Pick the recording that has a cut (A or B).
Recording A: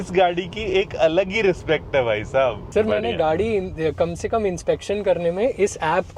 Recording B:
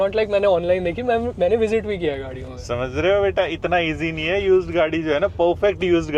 A